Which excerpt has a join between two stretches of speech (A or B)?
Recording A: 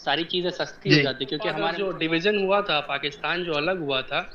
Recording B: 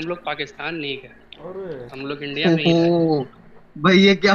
A